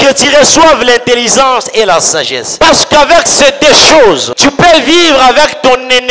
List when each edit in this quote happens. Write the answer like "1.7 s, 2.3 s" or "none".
2.5 s, 4.3 s